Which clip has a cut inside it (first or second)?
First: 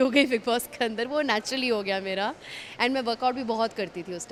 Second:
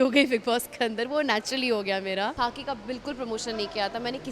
second